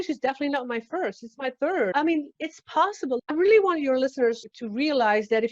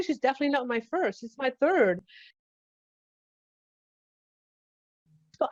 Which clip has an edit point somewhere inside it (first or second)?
first